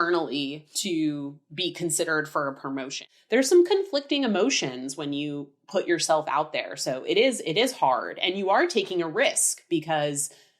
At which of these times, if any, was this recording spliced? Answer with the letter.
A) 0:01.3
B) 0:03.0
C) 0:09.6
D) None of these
B